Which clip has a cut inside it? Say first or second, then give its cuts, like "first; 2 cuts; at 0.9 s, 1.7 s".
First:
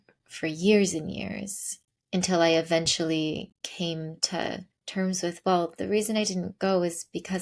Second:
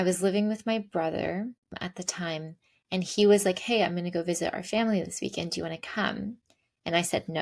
first; 2 cuts; at 3.6 s, 4.7 s